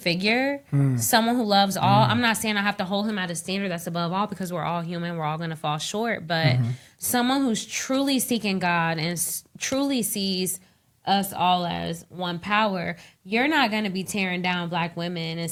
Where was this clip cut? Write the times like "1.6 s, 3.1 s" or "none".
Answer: none